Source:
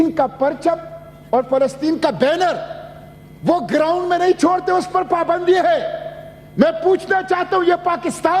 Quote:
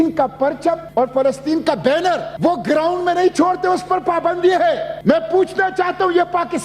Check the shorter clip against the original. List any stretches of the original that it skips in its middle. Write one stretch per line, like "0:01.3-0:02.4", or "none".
0:00.8-0:01.2
0:02.7-0:03.3
0:05.9-0:06.4